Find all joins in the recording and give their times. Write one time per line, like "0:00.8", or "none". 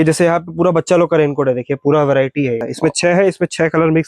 0:02.7